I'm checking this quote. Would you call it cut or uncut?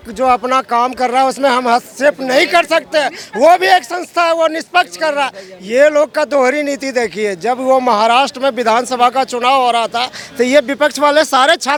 uncut